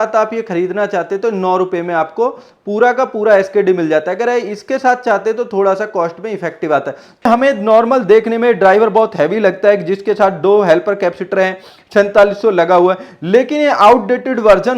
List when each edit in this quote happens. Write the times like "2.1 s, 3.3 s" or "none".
7.3 s